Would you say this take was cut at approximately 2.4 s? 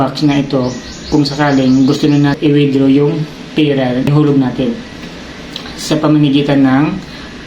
yes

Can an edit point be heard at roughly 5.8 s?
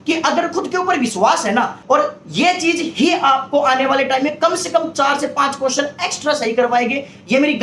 no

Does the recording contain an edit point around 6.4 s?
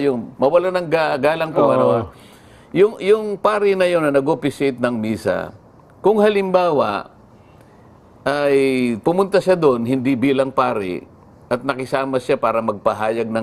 no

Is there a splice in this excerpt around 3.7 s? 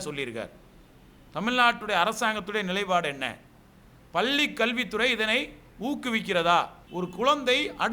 no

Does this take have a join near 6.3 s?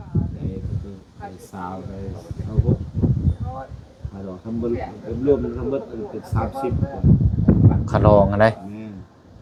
no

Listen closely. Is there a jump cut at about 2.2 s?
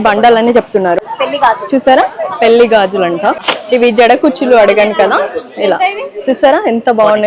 no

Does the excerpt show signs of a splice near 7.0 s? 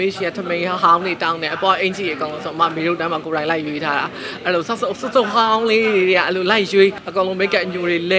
yes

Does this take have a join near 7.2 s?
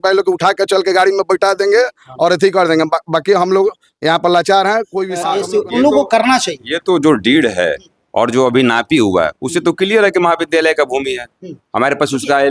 no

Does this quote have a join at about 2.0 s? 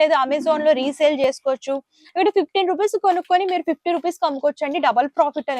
yes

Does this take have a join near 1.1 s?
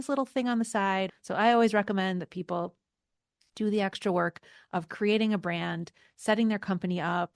yes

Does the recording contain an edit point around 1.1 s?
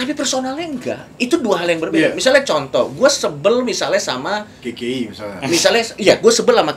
yes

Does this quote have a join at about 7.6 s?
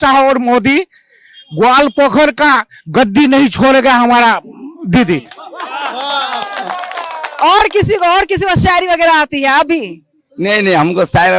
no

